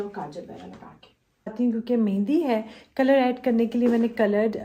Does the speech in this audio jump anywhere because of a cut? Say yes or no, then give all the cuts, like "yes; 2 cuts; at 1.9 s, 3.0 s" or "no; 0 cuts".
yes; 1 cut; at 1.5 s